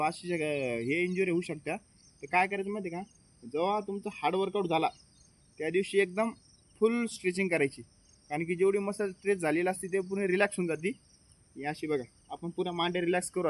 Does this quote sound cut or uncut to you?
uncut